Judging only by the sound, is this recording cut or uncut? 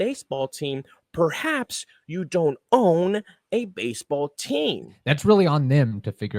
cut